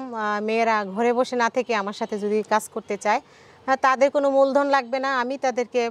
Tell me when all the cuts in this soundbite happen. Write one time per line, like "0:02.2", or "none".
none